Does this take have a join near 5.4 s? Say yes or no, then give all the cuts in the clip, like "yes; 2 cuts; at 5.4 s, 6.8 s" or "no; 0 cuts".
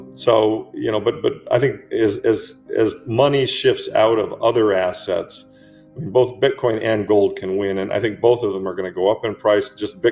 no; 0 cuts